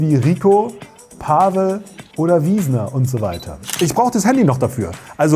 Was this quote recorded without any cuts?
no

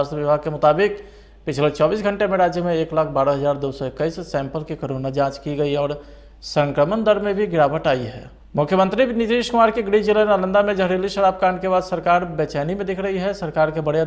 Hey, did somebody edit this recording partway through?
yes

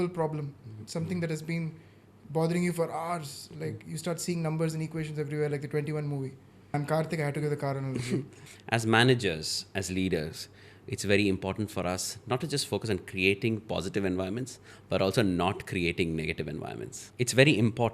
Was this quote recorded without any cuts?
no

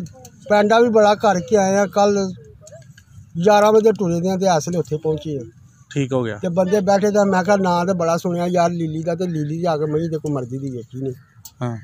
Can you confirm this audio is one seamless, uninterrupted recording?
yes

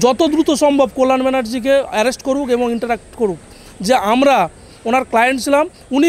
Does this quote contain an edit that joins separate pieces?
no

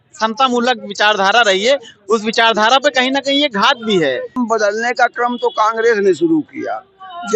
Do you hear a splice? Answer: yes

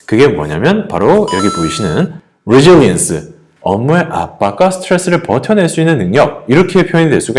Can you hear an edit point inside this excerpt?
yes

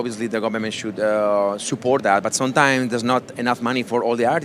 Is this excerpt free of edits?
yes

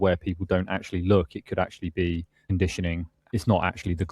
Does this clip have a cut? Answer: yes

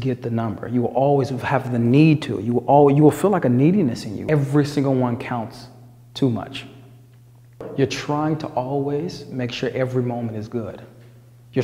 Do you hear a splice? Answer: yes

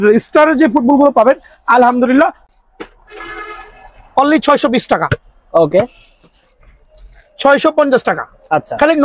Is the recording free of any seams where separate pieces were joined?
no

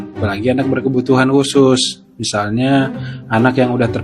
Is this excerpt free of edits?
yes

